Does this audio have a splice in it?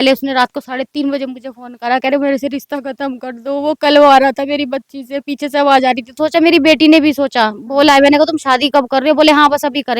yes; 1 cut; at 6.1 s

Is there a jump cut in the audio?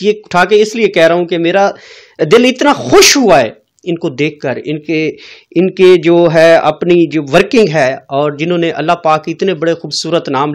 no; 0 cuts

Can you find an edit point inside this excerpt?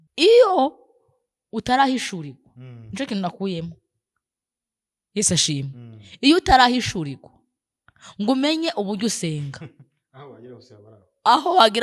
no; 0 cuts

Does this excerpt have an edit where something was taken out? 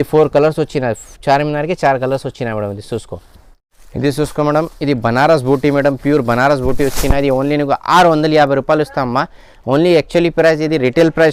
no; 0 cuts

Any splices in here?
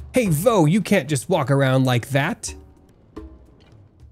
yes; 1 cut; at 2.8 s

